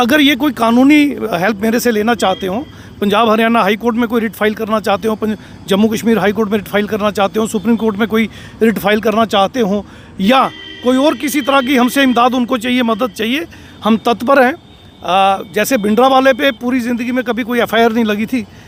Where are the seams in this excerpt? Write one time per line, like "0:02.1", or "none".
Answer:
none